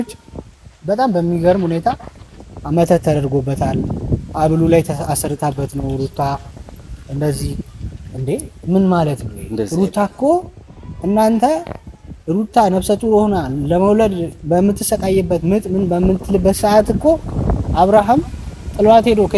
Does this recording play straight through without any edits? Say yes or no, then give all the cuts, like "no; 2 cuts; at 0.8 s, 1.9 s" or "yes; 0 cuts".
yes; 0 cuts